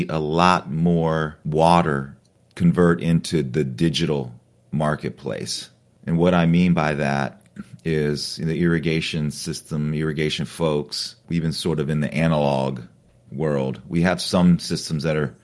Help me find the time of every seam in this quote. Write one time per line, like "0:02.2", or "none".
0:01.4
0:11.2

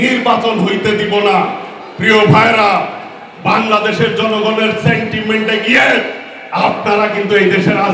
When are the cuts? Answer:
none

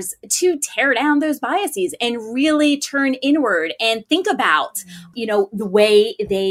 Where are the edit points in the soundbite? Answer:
0:05.1

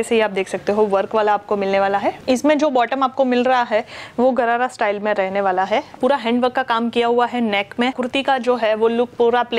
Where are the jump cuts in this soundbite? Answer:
0:02.2
0:06.0
0:08.0

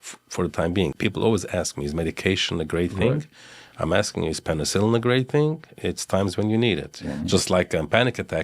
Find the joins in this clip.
0:00.9
0:07.0

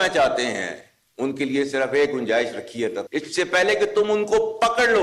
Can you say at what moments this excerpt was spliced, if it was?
0:03.0

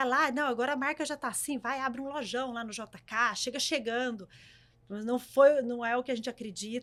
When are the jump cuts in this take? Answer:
none

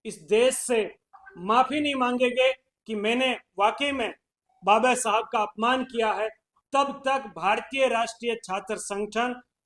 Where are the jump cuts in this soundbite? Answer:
none

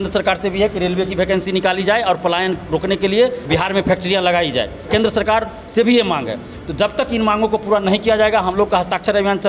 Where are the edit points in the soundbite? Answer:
0:03.4
0:04.8

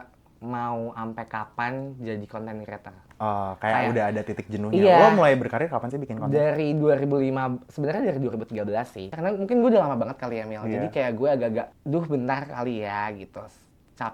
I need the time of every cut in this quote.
0:03.0
0:09.1
0:11.8

